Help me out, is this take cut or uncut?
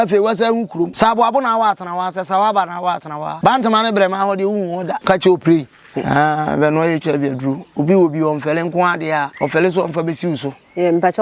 cut